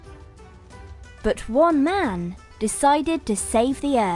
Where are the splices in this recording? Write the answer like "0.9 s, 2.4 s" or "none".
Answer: 1.0 s